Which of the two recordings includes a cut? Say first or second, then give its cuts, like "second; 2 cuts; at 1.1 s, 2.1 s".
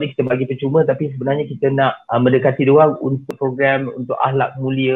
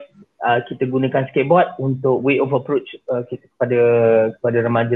first; 2 cuts; at 2.0 s, 3.2 s